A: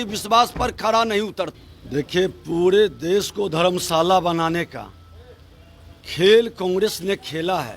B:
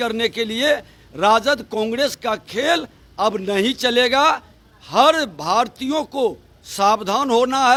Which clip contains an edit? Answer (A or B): A